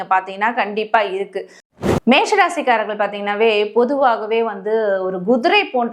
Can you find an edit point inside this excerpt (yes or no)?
yes